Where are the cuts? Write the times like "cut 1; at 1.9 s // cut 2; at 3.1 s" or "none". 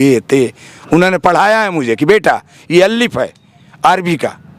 none